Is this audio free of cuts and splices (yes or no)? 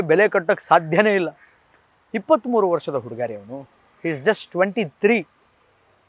yes